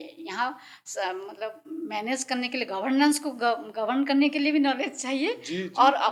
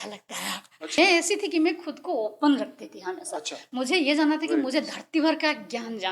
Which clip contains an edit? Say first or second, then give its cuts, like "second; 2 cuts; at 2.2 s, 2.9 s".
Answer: second; 1 cut; at 1.0 s